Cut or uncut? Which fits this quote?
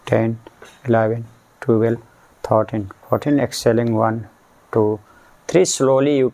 uncut